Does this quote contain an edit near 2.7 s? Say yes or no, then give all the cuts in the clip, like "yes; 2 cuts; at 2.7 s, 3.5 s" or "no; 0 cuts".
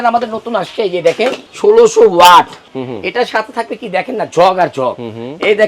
yes; 2 cuts; at 1.4 s, 2.7 s